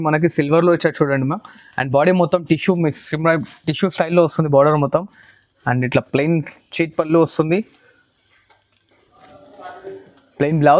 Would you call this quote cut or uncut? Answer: uncut